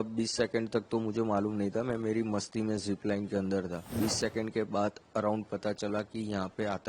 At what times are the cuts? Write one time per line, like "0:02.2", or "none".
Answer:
0:03.9